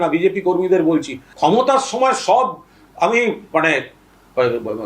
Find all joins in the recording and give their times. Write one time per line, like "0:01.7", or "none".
0:01.2

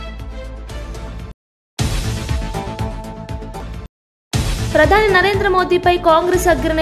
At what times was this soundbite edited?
0:01.1

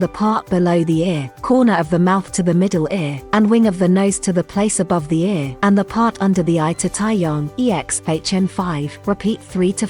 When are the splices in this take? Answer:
0:01.3
0:03.2
0:05.5
0:07.5
0:08.9

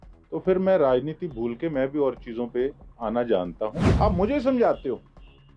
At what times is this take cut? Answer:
0:03.8

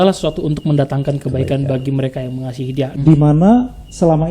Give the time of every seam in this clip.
0:02.9

